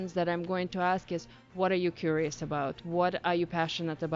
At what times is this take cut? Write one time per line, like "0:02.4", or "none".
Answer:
none